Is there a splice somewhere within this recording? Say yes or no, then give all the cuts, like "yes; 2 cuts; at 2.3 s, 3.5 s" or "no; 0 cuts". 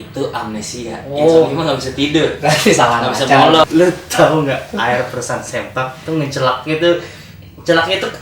yes; 1 cut; at 3.6 s